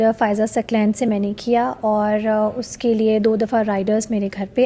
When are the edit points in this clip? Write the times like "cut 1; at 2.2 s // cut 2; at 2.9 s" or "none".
none